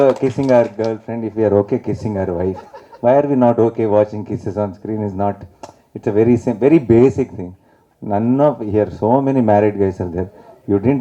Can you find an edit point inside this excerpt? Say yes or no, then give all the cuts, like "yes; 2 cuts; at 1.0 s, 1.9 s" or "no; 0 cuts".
no; 0 cuts